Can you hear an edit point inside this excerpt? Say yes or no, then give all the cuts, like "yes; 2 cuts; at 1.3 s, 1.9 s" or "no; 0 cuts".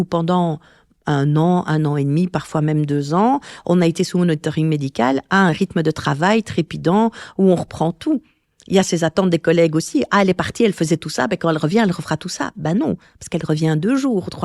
no; 0 cuts